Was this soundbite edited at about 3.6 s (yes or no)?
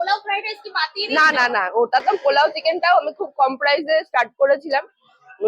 no